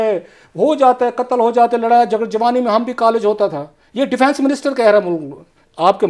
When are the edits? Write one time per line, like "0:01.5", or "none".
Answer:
none